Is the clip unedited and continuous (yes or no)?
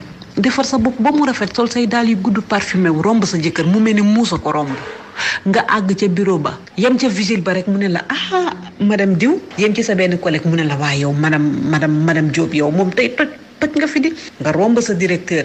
no